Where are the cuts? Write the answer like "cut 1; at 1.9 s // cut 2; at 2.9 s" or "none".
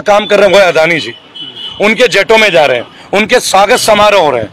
none

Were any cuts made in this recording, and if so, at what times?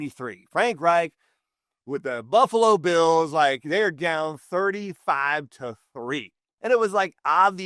cut 1; at 6.4 s

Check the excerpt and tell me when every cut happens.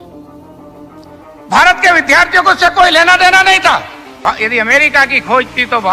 cut 1; at 4.1 s

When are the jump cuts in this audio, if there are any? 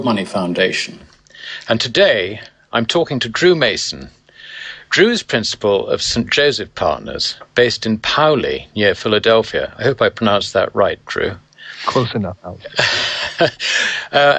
cut 1; at 9.6 s

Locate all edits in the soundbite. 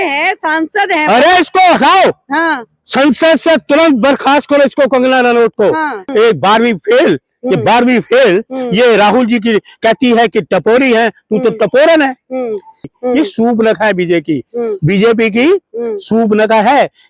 cut 1; at 6.0 s // cut 2; at 12.9 s

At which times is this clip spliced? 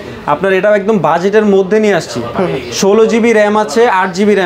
none

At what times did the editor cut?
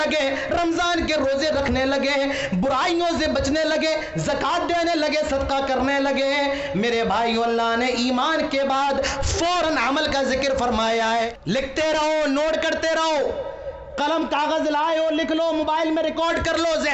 cut 1; at 11.3 s

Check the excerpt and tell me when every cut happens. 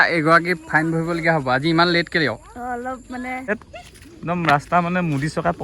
cut 1; at 3.5 s

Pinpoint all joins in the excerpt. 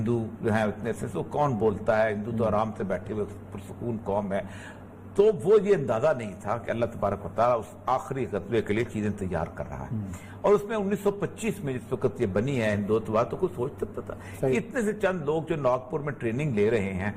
none

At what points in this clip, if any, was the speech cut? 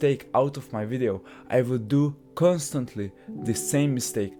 none

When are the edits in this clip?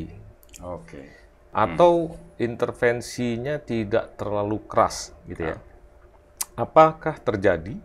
cut 1; at 1.4 s

